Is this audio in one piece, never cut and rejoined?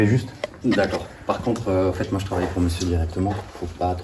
yes; 0 cuts

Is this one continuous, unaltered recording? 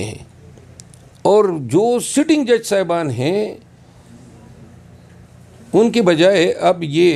yes; 0 cuts

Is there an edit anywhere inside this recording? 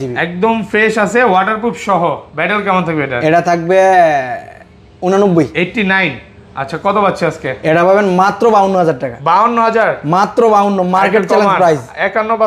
no; 0 cuts

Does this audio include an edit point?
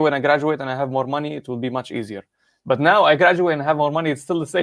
no; 0 cuts

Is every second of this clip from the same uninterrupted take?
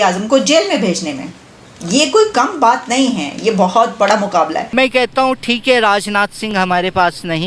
no; 1 cut; at 4.6 s

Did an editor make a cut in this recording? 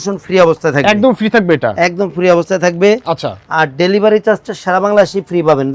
no; 0 cuts

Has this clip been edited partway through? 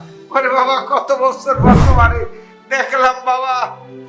no; 0 cuts

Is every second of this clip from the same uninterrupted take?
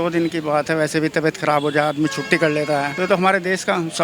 no; 1 cut; at 2.9 s

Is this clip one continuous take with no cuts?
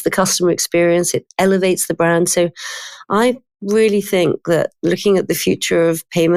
yes; 0 cuts

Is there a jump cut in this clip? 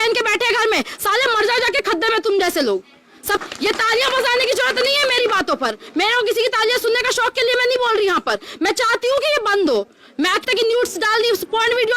yes; 2 cuts; at 3.4 s, 10.4 s

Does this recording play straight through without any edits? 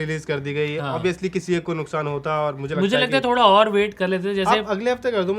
yes; 0 cuts

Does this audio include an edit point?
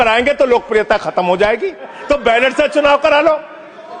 yes; 1 cut; at 1.9 s

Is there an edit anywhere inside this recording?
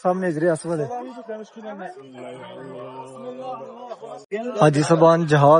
yes; 1 cut; at 4.2 s

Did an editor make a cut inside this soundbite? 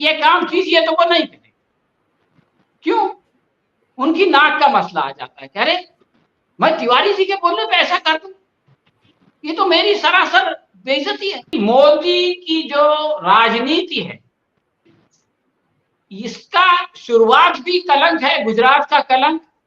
yes; 1 cut; at 11.5 s

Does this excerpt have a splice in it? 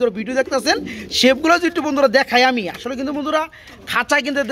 no; 0 cuts

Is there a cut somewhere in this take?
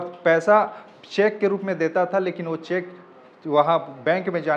no; 0 cuts

